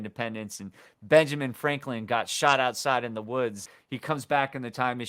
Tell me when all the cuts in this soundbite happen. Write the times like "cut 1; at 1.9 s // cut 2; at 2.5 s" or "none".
cut 1; at 3.7 s